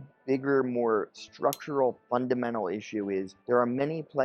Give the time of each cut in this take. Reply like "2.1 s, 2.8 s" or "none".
3.3 s